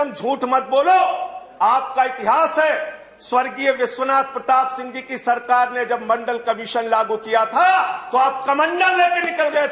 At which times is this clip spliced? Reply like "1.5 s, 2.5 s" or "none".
none